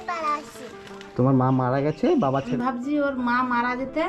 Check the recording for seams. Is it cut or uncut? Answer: cut